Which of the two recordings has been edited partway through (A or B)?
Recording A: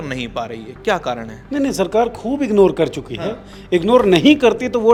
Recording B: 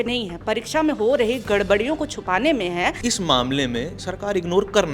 B